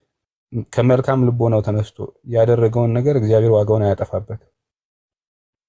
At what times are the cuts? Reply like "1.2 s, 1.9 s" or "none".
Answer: none